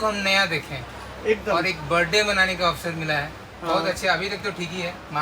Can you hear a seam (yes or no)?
no